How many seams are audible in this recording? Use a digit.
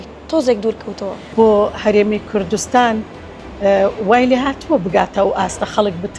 1